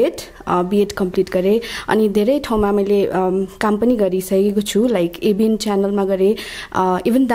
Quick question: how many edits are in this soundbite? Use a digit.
0